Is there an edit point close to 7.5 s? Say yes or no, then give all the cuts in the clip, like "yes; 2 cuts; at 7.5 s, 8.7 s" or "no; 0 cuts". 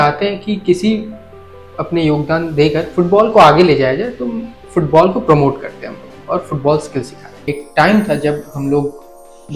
yes; 1 cut; at 7.5 s